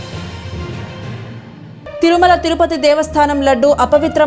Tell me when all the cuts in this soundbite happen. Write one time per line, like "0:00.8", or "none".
0:01.3